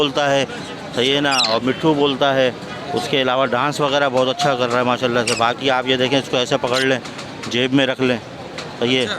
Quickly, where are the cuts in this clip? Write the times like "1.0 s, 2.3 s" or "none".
none